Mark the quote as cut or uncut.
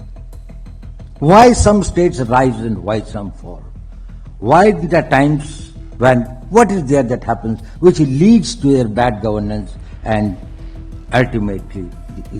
cut